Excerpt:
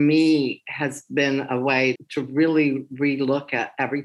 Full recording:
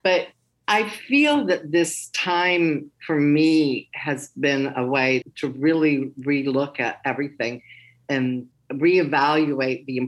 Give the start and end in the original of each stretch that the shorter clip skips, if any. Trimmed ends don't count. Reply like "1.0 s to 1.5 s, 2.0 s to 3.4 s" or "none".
none